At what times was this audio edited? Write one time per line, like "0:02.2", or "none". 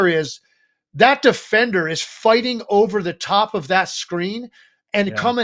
none